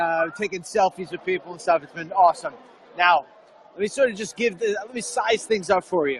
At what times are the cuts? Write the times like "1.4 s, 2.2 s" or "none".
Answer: none